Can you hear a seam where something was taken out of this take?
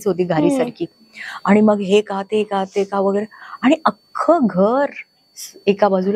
no; 0 cuts

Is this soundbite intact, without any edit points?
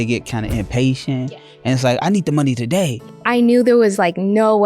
no; 1 cut; at 2.9 s

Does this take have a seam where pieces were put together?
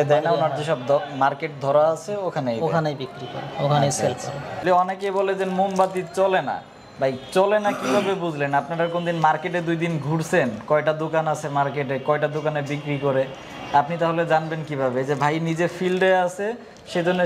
yes; 1 cut; at 4.6 s

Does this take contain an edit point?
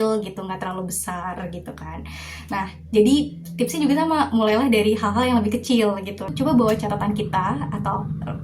yes; 1 cut; at 6.3 s

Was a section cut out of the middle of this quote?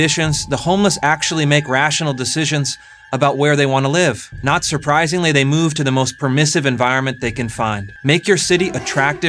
yes; 2 cuts; at 4.3 s, 7.9 s

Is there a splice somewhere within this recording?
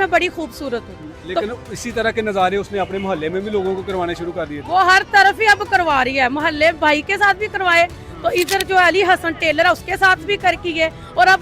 no; 0 cuts

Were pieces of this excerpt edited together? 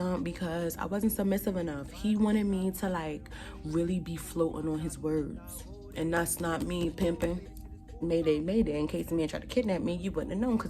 yes; 1 cut; at 8.0 s

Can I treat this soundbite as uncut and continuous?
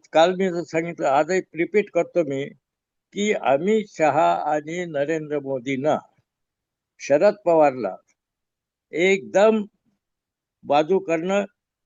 yes; 0 cuts

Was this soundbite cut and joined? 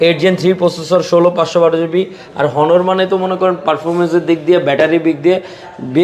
no; 0 cuts

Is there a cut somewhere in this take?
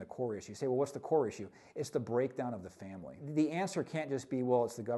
yes; 1 cut; at 3.2 s

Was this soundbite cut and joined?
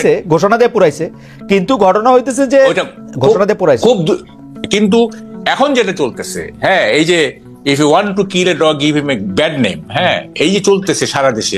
yes; 1 cut; at 4.7 s

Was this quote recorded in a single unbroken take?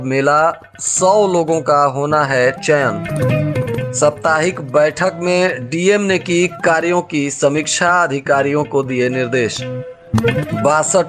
yes; 0 cuts

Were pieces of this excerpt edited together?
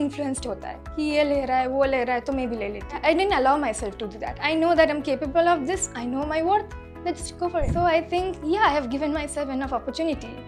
yes; 3 cuts; at 3.0 s, 4.3 s, 7.7 s

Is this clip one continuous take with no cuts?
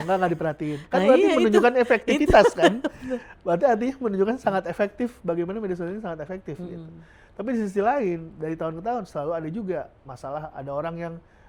yes; 0 cuts

